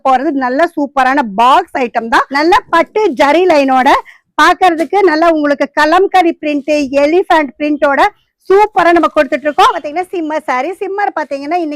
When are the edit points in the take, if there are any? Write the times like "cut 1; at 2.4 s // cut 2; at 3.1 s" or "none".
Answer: cut 1; at 2.3 s // cut 2; at 9.8 s